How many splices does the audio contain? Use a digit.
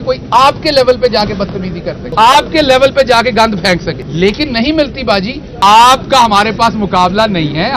3